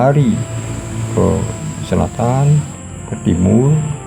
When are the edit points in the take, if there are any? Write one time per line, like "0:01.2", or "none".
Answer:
none